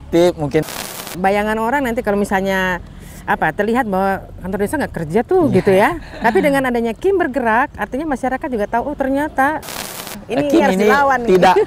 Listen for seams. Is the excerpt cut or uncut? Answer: cut